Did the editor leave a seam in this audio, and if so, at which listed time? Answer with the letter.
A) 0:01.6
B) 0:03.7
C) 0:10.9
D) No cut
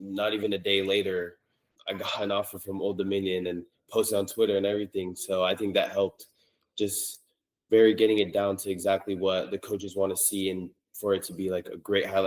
A